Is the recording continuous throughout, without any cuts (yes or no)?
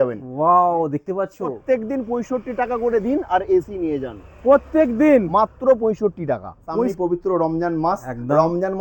no